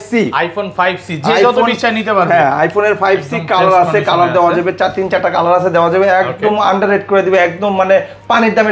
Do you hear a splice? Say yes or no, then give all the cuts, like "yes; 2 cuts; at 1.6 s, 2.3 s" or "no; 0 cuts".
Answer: no; 0 cuts